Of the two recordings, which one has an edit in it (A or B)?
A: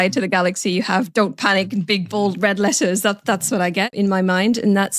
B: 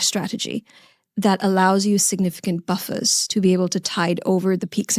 A